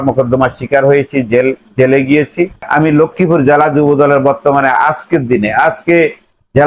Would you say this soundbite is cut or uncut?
cut